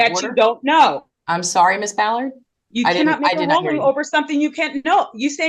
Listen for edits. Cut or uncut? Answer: uncut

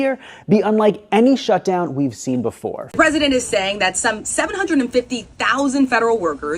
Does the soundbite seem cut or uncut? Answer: cut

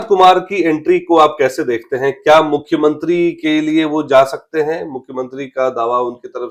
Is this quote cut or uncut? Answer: uncut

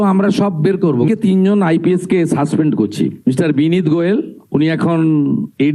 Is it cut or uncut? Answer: cut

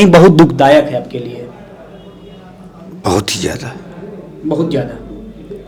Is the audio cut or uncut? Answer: uncut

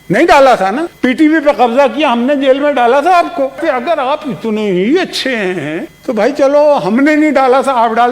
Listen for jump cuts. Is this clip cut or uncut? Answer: cut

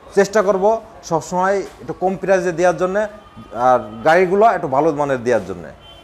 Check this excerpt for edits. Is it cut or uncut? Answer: uncut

